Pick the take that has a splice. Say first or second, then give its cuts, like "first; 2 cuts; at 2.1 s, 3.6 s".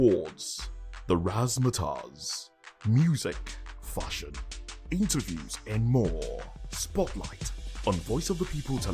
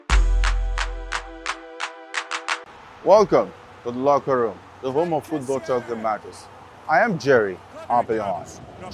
second; 1 cut; at 2.6 s